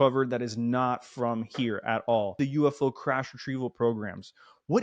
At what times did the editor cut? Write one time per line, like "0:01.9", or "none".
0:02.4